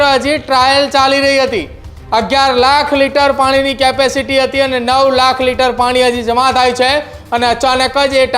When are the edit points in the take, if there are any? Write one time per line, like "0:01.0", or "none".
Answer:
none